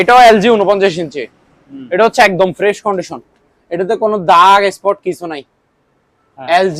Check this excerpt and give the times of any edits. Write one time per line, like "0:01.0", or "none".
none